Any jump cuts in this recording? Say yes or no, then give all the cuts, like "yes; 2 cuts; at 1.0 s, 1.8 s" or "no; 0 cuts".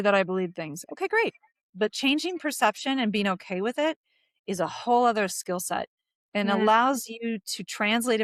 no; 0 cuts